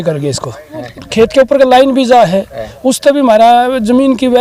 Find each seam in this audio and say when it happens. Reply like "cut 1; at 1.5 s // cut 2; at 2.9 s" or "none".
cut 1; at 1.0 s